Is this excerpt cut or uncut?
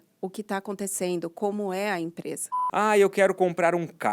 cut